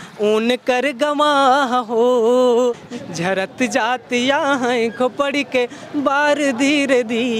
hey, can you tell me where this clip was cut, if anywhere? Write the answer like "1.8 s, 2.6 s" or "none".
3.0 s